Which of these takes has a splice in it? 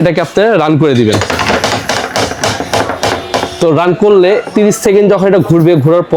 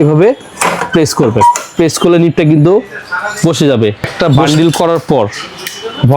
second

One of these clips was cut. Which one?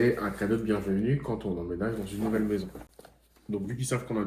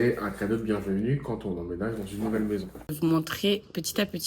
second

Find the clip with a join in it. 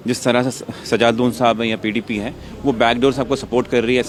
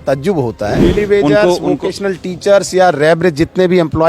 second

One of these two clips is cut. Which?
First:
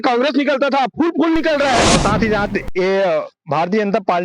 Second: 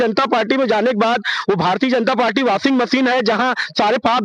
first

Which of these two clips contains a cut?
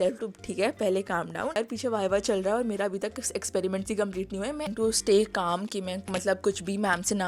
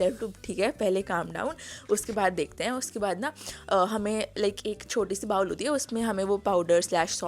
first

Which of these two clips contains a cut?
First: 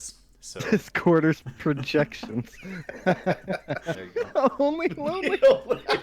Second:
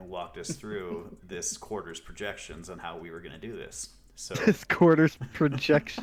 first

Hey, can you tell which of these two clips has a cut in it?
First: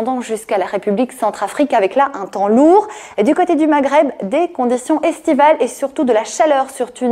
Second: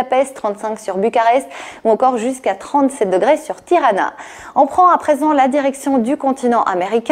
second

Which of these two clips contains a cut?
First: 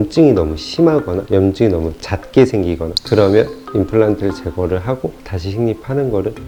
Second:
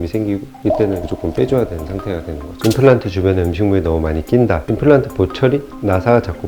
second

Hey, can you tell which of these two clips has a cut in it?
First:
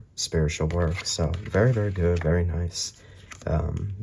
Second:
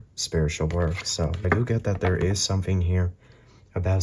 second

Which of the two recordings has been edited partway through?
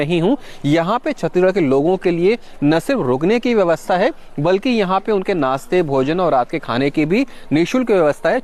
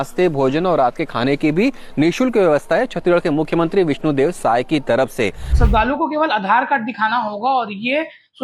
second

